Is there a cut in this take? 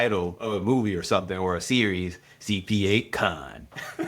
no; 0 cuts

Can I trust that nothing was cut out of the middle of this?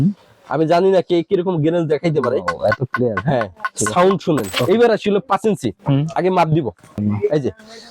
no; 2 cuts; at 4.5 s, 7.0 s

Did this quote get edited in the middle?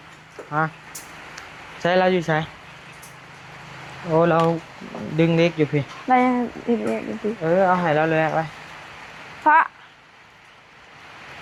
no; 0 cuts

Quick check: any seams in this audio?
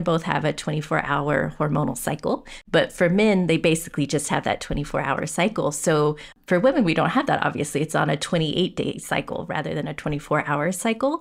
yes; 2 cuts; at 2.5 s, 6.3 s

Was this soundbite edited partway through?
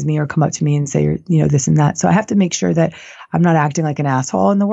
no; 0 cuts

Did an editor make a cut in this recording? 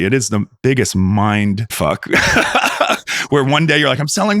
yes; 1 cut; at 1.7 s

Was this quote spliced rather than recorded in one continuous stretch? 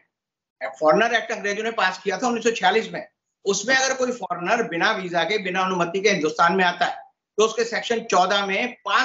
no; 0 cuts

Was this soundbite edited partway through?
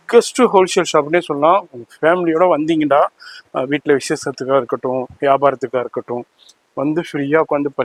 no; 0 cuts

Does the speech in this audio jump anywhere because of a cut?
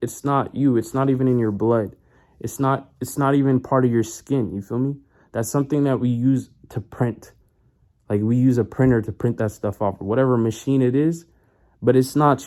no; 0 cuts

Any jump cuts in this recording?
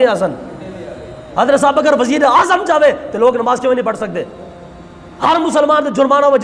no; 0 cuts

